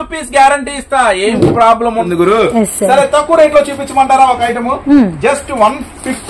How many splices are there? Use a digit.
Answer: 1